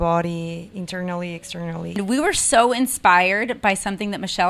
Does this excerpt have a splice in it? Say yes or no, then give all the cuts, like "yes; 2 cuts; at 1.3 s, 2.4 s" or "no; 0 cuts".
yes; 1 cut; at 2.0 s